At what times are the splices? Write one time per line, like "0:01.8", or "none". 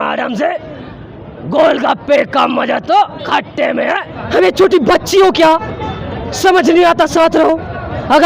0:04.1